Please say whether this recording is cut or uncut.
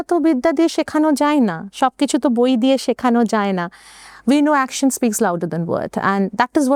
uncut